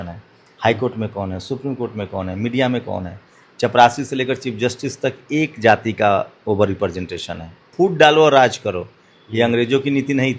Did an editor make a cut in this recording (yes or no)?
yes